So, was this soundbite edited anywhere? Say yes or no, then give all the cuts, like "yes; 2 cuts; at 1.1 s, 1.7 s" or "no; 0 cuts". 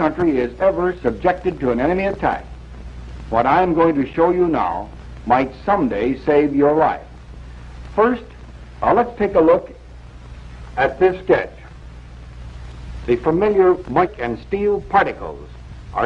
no; 0 cuts